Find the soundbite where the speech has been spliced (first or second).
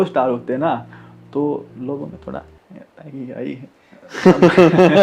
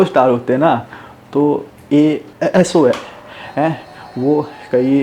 second